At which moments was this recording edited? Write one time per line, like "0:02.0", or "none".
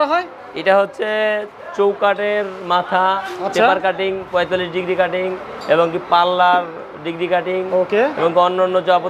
none